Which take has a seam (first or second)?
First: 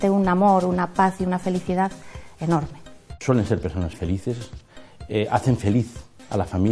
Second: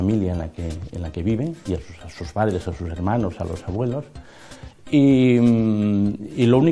first